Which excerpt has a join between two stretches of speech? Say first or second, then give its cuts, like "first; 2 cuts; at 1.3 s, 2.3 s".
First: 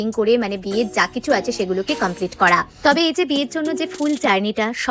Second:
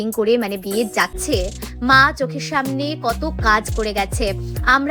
second; 1 cut; at 1.2 s